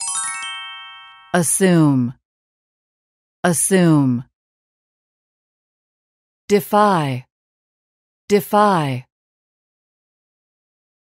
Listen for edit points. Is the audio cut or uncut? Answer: cut